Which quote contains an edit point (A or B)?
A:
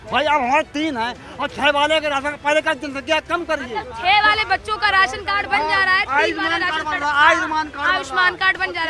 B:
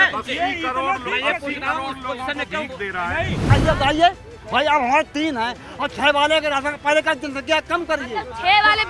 B